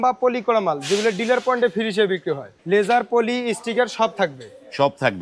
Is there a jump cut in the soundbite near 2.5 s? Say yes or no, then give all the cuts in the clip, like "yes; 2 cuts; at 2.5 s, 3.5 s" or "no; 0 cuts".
yes; 1 cut; at 2.5 s